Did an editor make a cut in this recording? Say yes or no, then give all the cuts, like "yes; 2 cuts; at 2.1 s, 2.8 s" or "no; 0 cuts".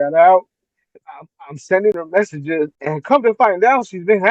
yes; 1 cut; at 2.8 s